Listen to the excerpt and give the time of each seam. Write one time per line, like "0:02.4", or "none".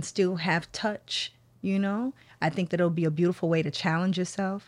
none